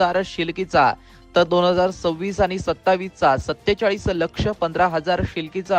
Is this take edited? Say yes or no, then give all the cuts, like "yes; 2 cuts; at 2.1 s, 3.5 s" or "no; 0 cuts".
no; 0 cuts